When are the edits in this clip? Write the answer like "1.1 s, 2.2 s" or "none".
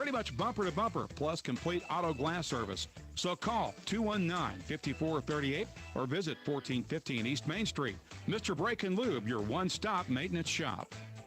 none